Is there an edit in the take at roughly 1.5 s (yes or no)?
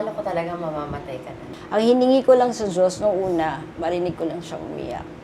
yes